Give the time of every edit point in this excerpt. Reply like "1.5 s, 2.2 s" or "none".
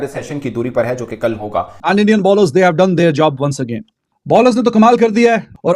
1.8 s

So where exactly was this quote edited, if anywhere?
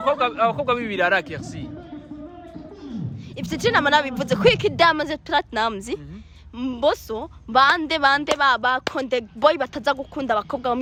none

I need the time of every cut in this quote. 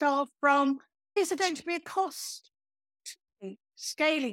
1.2 s

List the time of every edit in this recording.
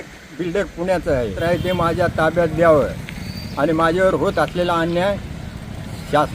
1.4 s

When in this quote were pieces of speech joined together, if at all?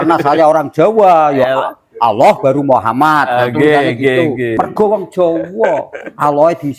4.5 s

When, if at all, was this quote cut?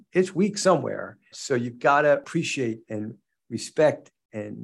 1.3 s, 2.3 s

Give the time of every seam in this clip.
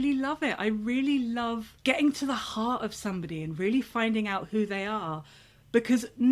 none

